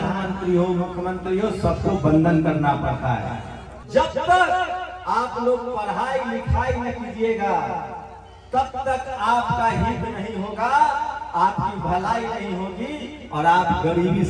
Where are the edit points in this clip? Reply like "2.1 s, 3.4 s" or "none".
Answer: 3.8 s